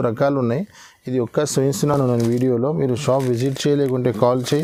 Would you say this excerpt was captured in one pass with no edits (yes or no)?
yes